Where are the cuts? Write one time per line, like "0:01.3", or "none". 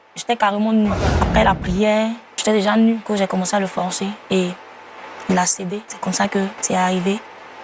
0:01.1
0:02.3
0:03.0
0:05.9
0:06.6